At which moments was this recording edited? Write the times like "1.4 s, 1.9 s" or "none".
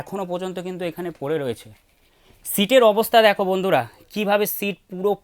none